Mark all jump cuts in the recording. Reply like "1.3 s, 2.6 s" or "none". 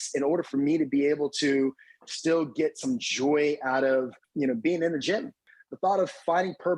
4.2 s, 5.4 s